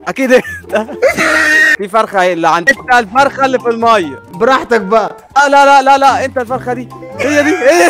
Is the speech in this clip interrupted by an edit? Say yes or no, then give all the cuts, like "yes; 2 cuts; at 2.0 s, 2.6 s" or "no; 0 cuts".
yes; 3 cuts; at 2.7 s, 4.2 s, 5.2 s